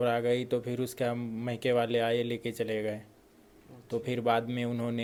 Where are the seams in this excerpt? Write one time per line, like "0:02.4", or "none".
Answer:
none

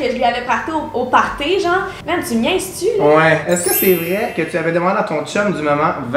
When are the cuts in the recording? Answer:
0:02.0
0:03.4

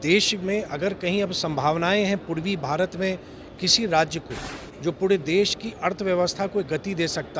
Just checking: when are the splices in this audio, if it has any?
none

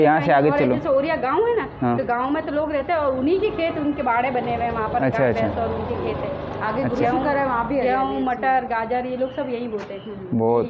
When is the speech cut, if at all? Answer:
none

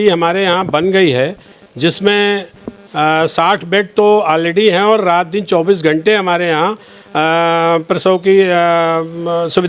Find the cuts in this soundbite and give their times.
none

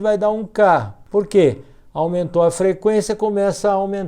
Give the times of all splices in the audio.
0:01.0

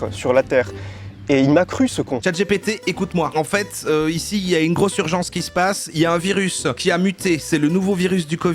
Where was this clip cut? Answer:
0:02.2

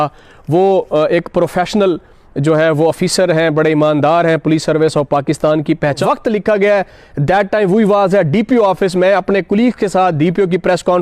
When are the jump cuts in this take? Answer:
0:06.0

